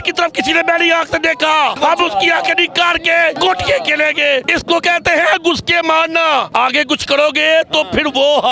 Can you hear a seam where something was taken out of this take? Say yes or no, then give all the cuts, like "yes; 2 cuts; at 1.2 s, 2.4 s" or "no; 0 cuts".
yes; 4 cuts; at 1.8 s, 3.4 s, 4.5 s, 6.5 s